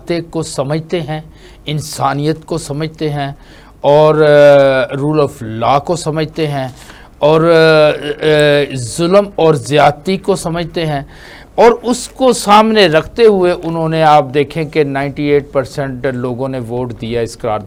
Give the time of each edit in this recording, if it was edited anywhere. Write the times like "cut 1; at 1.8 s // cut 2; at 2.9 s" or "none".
none